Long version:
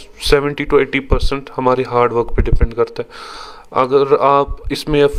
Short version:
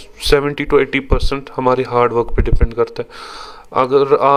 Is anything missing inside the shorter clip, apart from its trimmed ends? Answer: no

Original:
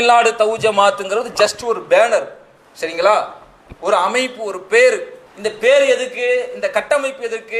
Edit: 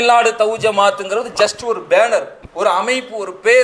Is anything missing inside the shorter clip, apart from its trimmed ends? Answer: yes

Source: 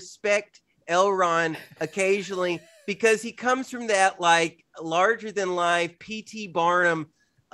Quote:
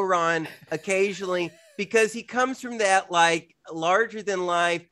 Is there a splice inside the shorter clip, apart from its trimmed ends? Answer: no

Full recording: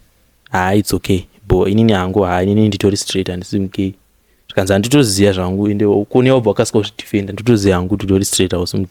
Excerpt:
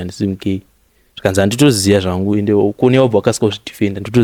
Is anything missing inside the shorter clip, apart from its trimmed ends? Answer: no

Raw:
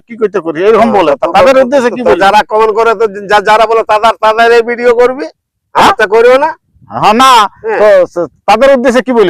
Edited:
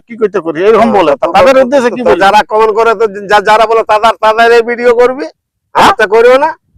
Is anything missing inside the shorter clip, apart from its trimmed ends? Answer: no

